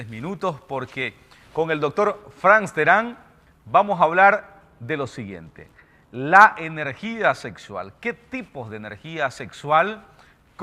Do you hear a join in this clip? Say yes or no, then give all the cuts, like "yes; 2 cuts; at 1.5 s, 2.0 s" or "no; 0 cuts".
yes; 1 cut; at 8.5 s